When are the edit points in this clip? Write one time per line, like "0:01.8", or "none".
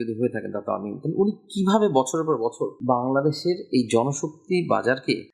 none